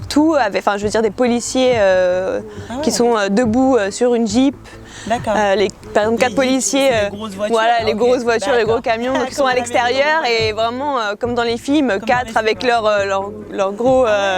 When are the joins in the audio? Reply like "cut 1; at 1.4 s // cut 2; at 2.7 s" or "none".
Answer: none

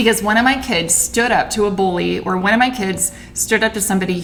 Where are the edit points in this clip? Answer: none

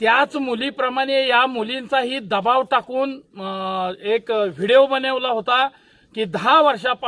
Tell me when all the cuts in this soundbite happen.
none

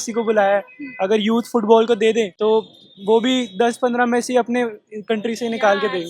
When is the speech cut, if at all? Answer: cut 1; at 2.3 s

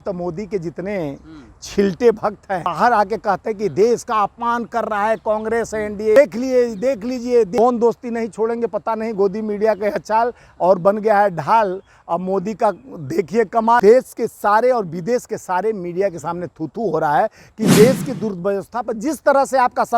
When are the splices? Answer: cut 1; at 2.7 s // cut 2; at 6.2 s // cut 3; at 7.6 s // cut 4; at 13.8 s

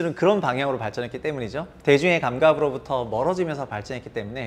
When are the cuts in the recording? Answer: none

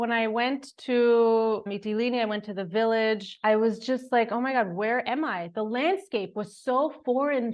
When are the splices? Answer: none

